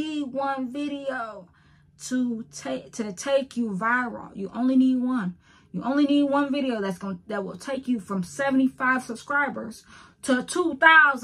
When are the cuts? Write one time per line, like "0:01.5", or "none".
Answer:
none